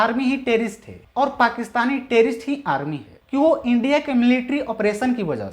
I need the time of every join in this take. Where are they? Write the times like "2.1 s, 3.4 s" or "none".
3.1 s